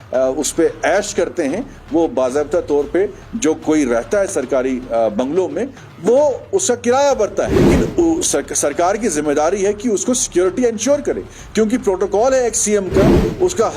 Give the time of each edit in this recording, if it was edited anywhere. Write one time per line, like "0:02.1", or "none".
0:07.6